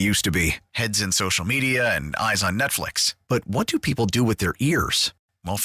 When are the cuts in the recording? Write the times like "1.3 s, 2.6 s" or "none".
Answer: none